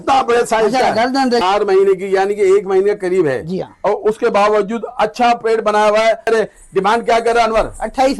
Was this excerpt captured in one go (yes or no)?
no